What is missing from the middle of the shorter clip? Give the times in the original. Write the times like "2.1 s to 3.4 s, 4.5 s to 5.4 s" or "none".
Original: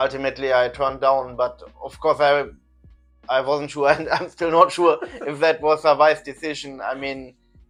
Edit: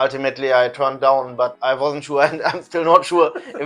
1.6 s to 3.2 s